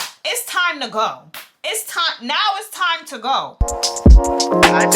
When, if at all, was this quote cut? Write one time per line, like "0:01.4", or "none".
0:03.6